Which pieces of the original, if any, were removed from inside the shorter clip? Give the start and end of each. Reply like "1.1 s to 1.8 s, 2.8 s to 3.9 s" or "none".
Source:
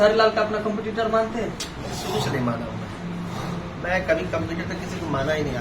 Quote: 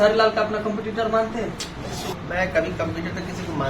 2.1 s to 3.6 s